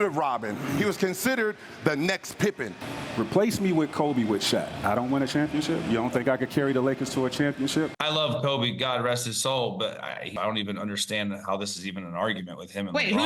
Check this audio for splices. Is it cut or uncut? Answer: cut